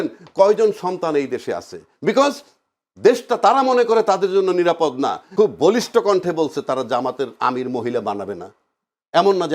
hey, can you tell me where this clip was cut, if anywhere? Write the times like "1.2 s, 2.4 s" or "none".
5.3 s